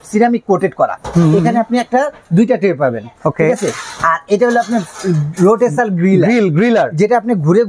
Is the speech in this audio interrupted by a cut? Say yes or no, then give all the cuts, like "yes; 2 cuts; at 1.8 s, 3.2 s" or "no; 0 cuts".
no; 0 cuts